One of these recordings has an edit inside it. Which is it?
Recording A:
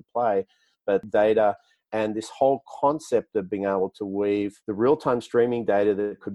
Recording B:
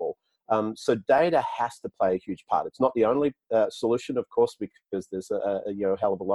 A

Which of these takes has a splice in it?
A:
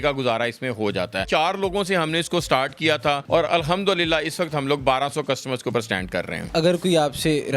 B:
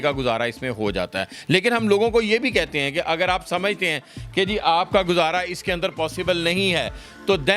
A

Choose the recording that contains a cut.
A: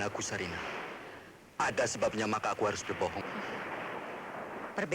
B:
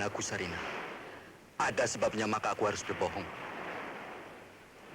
A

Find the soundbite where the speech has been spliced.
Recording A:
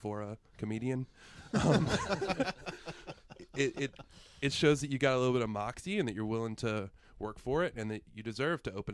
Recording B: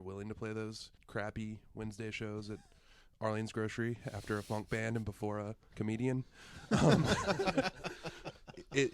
B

